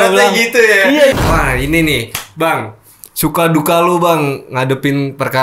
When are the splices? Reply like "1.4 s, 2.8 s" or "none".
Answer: 1.1 s

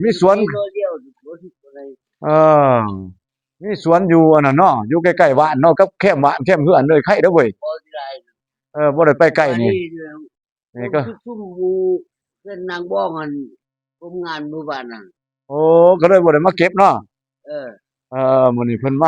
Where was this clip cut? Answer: none

